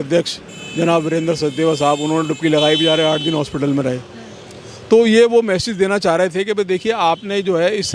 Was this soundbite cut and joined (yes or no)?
no